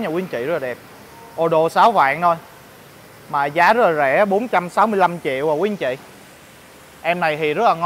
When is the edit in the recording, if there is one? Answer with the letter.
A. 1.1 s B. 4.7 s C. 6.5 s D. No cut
D